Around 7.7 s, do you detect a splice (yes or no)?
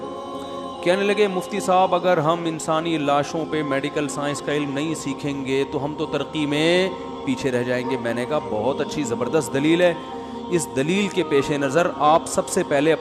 no